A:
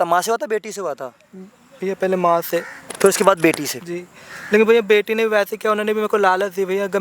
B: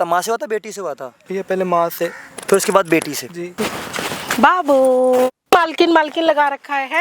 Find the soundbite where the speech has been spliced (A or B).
B